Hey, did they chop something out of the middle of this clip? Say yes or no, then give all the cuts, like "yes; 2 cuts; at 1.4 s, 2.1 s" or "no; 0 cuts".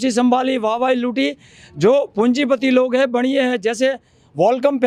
no; 0 cuts